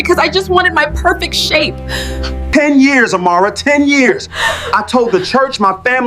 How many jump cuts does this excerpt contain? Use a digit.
1